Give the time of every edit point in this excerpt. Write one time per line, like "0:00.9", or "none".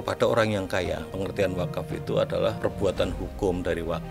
0:01.1
0:02.6